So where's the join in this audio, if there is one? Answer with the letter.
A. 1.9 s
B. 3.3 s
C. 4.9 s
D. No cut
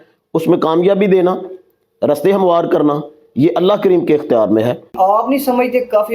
C